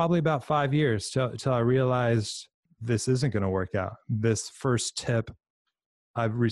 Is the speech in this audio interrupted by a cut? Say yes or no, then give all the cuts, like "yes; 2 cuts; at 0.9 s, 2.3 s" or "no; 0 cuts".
yes; 1 cut; at 2.7 s